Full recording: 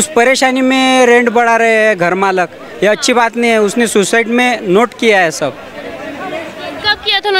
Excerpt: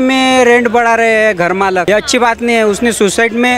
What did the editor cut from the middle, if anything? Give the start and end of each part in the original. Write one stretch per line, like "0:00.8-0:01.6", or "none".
0:02.4-0:02.8